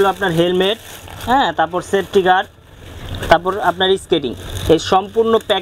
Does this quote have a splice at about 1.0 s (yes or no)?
no